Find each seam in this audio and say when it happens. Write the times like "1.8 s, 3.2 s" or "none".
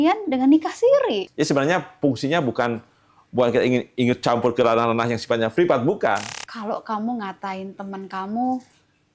1.3 s, 6.3 s